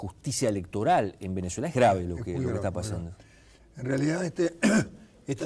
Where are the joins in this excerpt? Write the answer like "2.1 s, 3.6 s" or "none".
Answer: none